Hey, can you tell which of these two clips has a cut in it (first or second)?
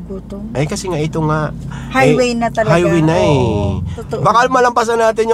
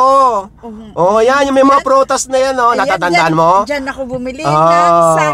first